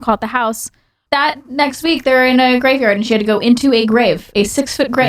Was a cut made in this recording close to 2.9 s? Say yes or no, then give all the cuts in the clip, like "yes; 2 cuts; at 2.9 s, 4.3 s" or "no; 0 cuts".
no; 1 cut; at 1.0 s